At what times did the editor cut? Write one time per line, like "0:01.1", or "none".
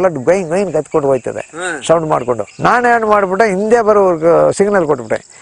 none

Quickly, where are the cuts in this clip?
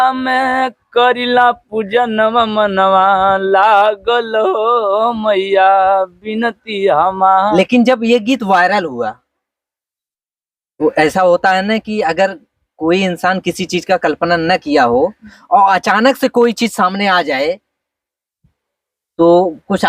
0:07.5

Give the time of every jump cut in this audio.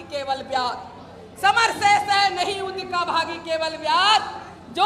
none

